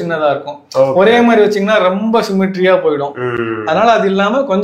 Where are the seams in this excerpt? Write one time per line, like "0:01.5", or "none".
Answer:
none